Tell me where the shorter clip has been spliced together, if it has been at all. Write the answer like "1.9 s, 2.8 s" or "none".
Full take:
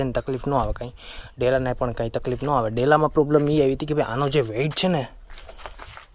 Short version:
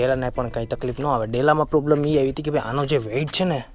none